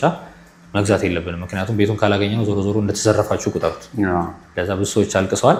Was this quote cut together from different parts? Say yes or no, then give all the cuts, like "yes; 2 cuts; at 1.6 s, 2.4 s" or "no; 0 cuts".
no; 0 cuts